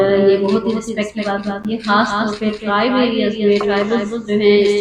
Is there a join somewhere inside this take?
no; 0 cuts

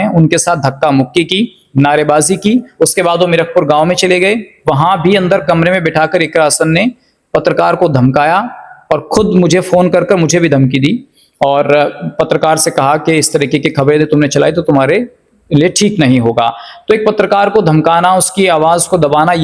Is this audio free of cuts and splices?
yes; 0 cuts

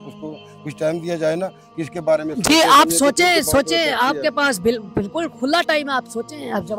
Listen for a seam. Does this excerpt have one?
no; 0 cuts

